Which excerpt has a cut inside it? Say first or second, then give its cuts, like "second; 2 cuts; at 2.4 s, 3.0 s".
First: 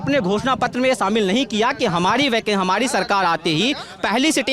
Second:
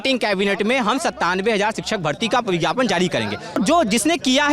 second; 1 cut; at 3.6 s